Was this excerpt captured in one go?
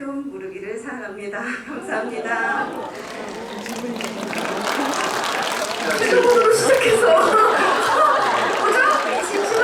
yes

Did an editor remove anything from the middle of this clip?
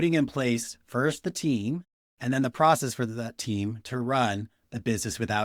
no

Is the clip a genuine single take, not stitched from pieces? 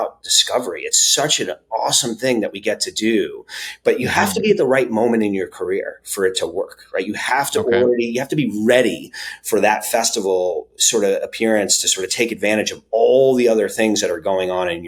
yes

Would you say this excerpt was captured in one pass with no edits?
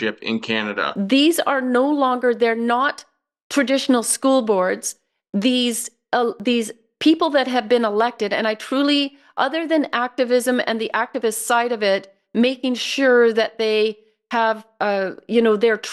no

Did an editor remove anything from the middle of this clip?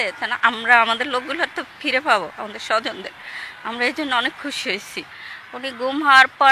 yes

